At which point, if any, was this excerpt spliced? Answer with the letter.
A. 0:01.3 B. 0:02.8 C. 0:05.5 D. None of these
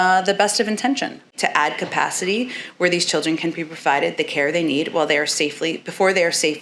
A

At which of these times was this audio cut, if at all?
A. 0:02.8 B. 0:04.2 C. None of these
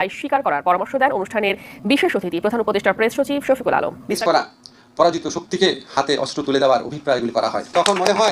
B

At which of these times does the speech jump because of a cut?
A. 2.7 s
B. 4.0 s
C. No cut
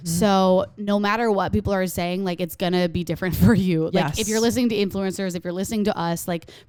C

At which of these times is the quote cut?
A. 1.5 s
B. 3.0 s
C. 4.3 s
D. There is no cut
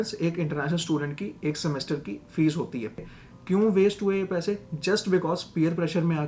B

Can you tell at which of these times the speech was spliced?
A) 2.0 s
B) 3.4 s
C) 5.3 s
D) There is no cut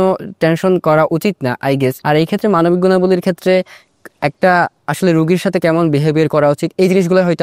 A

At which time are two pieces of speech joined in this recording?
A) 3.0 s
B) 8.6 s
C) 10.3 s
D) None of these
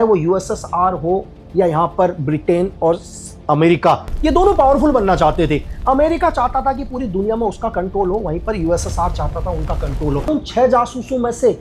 C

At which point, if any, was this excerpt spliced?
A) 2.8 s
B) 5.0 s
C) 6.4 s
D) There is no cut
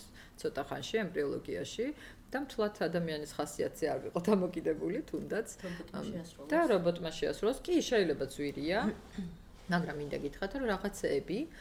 D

